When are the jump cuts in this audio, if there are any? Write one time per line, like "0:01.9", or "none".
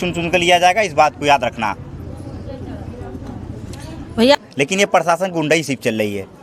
0:04.4